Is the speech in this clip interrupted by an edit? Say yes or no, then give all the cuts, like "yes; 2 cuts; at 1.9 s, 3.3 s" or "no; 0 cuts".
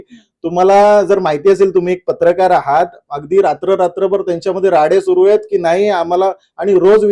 no; 0 cuts